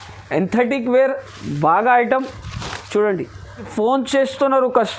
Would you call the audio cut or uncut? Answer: cut